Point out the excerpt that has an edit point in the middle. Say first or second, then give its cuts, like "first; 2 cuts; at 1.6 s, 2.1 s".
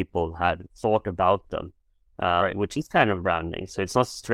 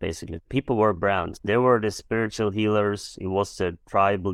second; 1 cut; at 1.3 s